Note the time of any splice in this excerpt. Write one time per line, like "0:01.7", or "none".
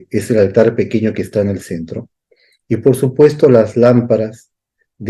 none